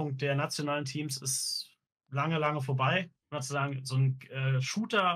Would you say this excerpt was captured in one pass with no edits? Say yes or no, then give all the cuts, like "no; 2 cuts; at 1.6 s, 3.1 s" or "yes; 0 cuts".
no; 1 cut; at 3.2 s